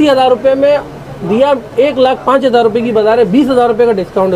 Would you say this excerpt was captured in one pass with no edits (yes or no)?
yes